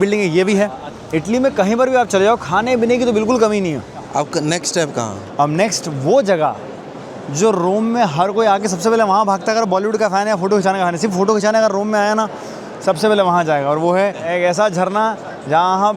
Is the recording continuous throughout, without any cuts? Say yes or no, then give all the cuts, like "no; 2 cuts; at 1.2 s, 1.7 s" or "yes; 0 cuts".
no; 3 cuts; at 0.9 s, 4.1 s, 14.2 s